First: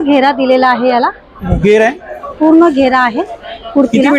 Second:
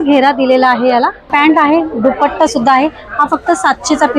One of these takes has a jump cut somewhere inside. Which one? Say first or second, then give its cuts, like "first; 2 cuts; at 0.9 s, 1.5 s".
second; 1 cut; at 1.3 s